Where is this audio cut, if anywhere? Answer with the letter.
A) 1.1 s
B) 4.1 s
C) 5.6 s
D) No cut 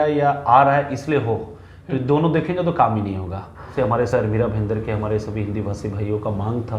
B